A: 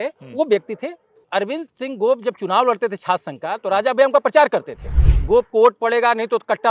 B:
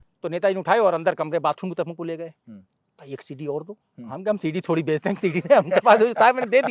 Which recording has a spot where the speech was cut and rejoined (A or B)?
A